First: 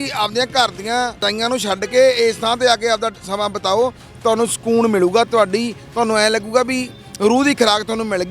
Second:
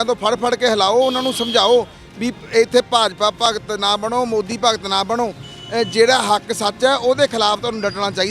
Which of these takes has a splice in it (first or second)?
first